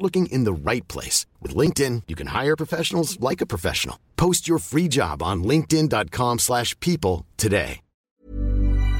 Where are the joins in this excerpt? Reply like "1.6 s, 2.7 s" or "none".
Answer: 8.1 s

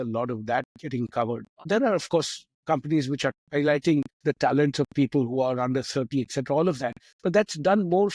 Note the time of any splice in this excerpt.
1.6 s, 3.4 s

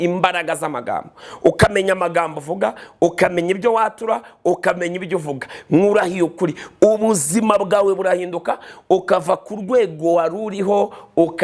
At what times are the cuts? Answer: none

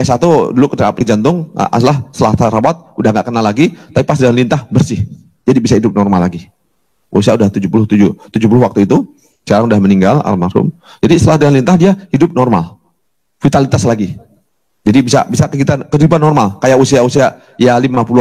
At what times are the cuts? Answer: 1.0 s

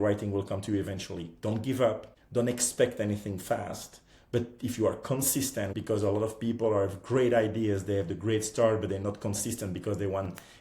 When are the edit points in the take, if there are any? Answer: 2.1 s, 5.7 s

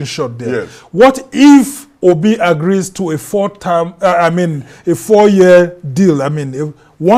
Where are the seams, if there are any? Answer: none

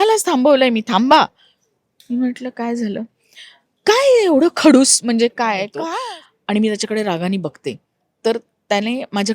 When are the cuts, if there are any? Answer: 5.8 s

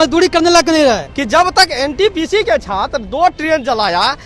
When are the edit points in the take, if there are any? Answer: 1.1 s

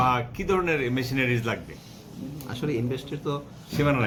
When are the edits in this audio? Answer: none

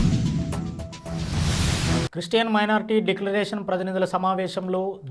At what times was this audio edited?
none

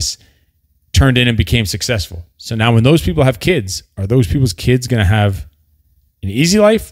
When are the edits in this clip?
none

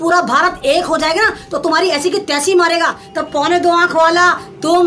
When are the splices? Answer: 3.0 s

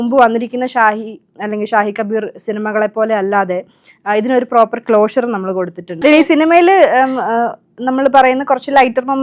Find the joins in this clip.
6.0 s

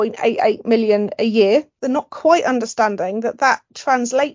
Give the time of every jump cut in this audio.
1.8 s

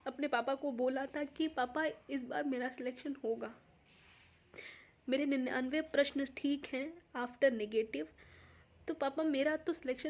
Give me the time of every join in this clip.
none

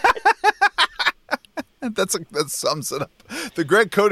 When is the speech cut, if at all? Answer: none

